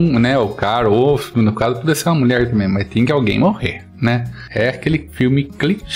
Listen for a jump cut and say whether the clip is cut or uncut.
cut